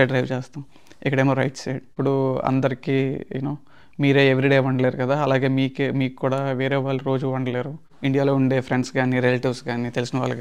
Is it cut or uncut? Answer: cut